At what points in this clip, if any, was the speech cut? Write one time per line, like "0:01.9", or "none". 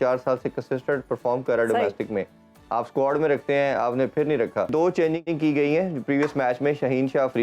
0:04.7